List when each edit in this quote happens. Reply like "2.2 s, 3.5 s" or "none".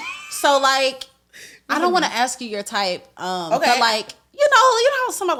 none